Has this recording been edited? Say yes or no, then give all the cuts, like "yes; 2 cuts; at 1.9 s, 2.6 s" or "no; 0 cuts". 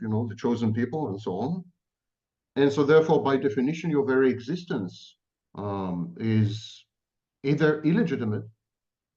no; 0 cuts